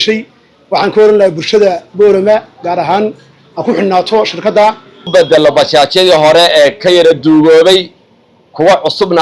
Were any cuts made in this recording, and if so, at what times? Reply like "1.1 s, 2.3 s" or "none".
5.1 s

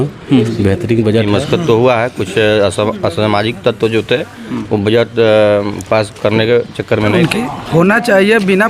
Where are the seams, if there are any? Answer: 1.3 s, 7.1 s

